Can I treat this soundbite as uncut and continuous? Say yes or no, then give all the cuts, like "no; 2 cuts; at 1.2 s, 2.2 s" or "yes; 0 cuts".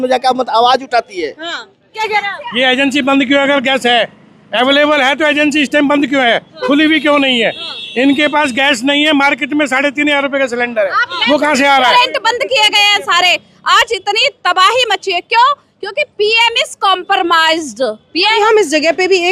no; 3 cuts; at 2.0 s, 11.9 s, 18.3 s